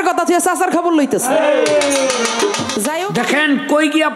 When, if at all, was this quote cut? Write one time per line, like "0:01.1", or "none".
0:03.0